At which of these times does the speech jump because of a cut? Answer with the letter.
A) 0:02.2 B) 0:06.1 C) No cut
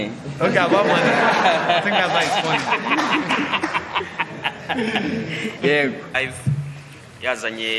B